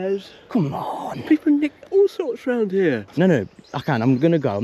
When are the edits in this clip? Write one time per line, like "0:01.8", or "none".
0:03.1